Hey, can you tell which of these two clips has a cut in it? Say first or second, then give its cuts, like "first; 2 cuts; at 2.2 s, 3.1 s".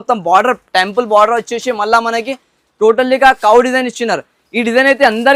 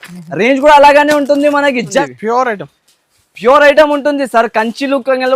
second; 1 cut; at 2.1 s